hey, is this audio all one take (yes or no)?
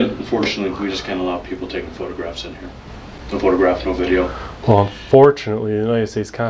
yes